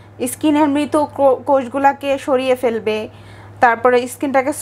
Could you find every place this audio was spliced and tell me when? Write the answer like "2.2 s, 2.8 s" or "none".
none